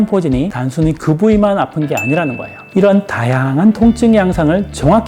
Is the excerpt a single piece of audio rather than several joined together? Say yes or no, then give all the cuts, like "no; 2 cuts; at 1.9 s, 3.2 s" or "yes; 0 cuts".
no; 1 cut; at 2.5 s